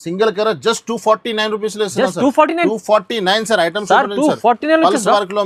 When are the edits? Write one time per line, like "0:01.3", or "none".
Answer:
none